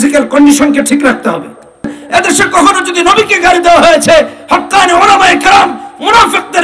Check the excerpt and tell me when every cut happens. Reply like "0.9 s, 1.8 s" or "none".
2.0 s